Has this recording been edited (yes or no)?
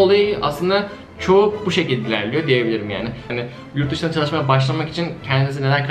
yes